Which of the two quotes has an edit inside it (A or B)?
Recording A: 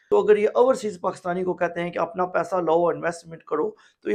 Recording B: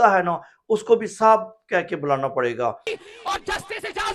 B